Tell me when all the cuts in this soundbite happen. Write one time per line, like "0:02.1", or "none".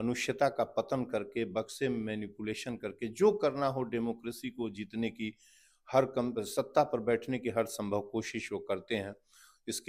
none